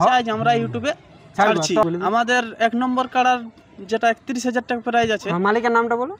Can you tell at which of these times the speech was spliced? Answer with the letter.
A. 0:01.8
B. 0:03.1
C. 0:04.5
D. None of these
A